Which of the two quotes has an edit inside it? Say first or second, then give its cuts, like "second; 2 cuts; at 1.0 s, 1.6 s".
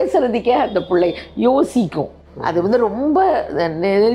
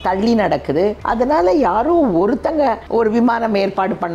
second; 2 cuts; at 1.0 s, 2.8 s